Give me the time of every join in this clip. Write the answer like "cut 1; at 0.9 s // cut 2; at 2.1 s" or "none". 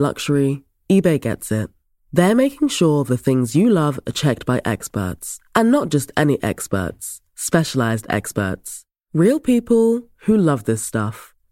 none